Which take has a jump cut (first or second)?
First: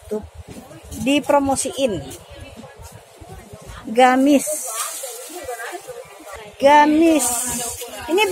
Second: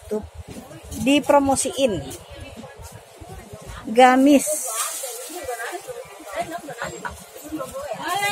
first